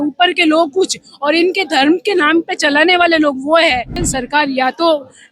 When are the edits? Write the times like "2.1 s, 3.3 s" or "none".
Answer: 4.1 s